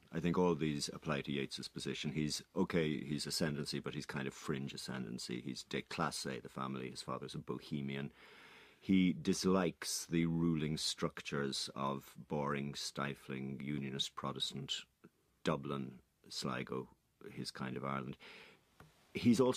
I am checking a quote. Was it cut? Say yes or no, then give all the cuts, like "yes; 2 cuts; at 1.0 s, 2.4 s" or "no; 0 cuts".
yes; 1 cut; at 6.8 s